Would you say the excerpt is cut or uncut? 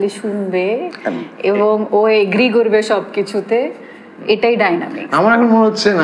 uncut